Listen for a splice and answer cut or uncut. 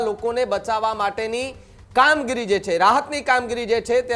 uncut